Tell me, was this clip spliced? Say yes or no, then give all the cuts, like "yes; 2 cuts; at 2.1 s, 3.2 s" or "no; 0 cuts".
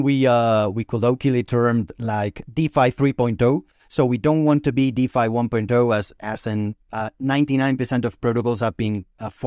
no; 0 cuts